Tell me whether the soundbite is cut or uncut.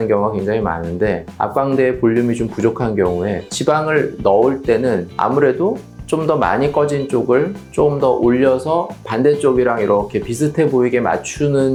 uncut